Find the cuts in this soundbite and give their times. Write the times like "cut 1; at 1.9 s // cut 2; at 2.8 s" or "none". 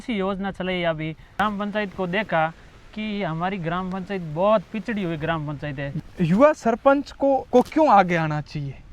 cut 1; at 1.4 s // cut 2; at 5.9 s // cut 3; at 7.4 s